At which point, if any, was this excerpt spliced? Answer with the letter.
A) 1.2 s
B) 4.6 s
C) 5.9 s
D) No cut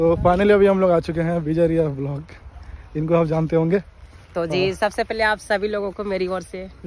D